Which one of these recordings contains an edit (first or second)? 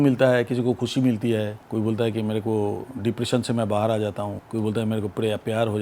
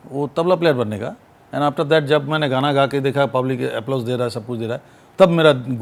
first